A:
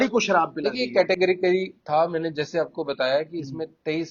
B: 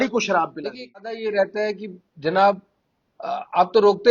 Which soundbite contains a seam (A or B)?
B